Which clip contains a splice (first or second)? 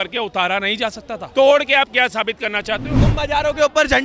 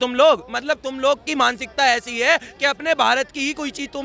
first